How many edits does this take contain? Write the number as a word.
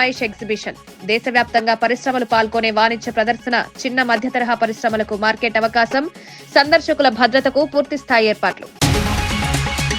one